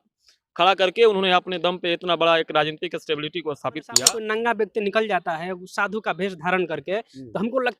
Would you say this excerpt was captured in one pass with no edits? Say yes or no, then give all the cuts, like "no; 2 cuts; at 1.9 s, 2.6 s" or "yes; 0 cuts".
no; 1 cut; at 4.0 s